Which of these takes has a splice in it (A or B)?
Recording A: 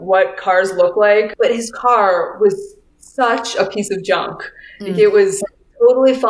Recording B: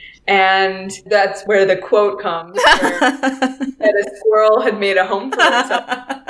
A